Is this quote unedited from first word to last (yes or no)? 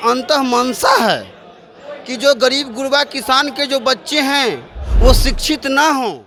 yes